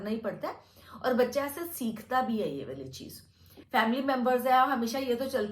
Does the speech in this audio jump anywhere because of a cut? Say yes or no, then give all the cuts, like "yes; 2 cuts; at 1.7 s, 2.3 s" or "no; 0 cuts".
yes; 1 cut; at 3.5 s